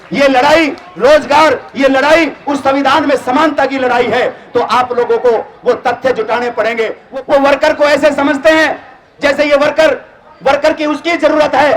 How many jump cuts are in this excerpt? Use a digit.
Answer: 1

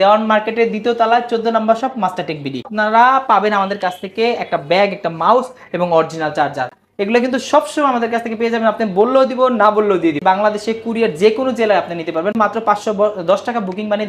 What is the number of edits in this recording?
3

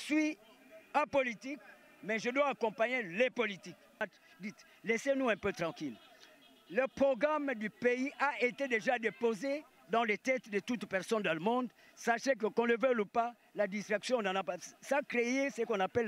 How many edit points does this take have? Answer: 1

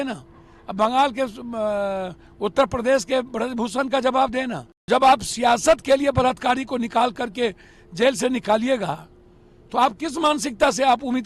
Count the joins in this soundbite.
1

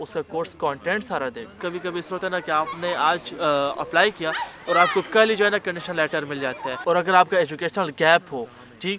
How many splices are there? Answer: 2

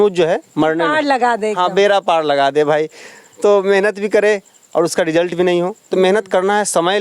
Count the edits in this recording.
0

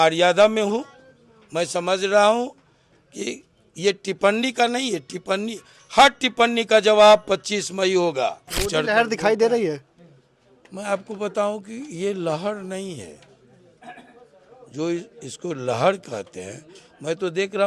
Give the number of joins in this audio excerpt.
1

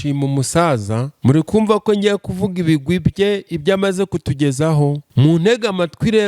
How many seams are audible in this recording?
2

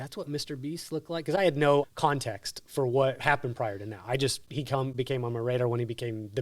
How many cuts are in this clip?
2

